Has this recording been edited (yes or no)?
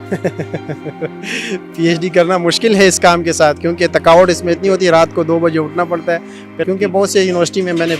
yes